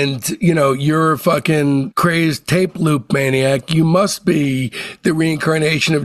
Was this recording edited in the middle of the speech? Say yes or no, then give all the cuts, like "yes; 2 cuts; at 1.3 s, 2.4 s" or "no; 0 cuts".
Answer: no; 0 cuts